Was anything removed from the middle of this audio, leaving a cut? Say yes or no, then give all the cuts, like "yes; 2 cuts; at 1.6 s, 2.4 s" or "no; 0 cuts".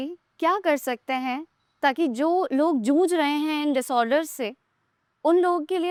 no; 0 cuts